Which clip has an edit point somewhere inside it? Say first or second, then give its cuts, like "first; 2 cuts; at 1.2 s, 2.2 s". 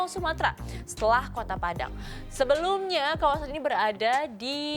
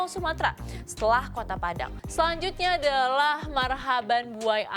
second; 1 cut; at 2.0 s